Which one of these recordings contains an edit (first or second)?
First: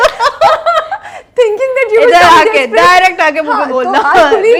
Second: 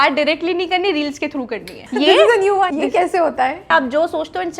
second